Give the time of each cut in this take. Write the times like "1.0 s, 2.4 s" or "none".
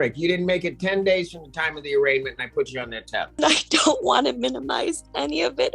3.4 s